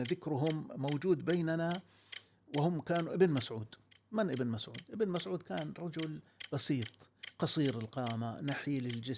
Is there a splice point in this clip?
no; 0 cuts

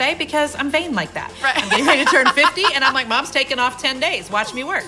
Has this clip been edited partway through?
no; 0 cuts

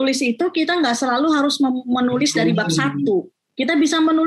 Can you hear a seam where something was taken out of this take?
no; 0 cuts

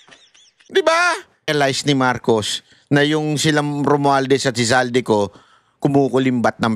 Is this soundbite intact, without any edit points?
no; 1 cut; at 1.5 s

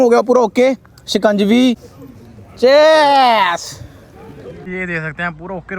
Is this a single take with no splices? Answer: no; 2 cuts; at 1.9 s, 4.6 s

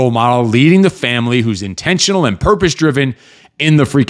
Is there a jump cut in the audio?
no; 0 cuts

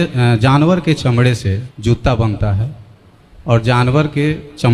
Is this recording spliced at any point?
yes; 1 cut; at 1.7 s

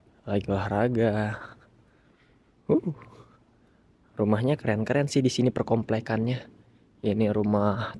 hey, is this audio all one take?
yes; 0 cuts

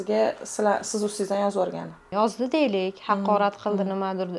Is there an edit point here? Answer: yes; 1 cut; at 2.1 s

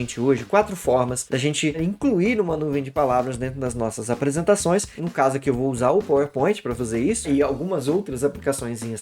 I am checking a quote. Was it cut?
yes; 3 cuts; at 1.8 s, 4.9 s, 7.3 s

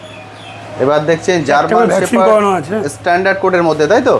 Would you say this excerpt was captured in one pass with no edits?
yes; 0 cuts

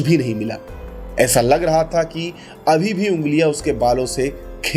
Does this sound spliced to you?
no; 0 cuts

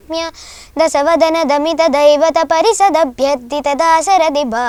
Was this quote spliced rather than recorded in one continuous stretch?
no; 0 cuts

